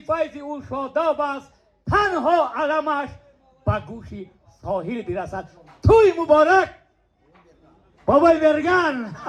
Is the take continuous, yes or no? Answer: yes